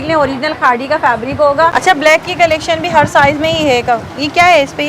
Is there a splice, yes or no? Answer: yes